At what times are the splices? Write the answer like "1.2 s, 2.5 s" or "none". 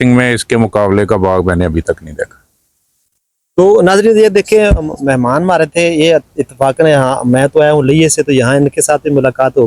none